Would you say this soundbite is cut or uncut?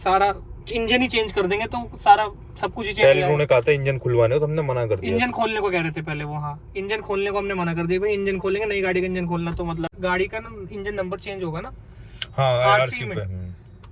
cut